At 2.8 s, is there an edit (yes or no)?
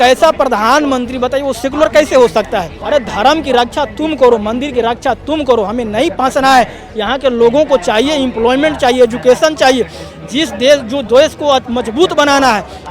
yes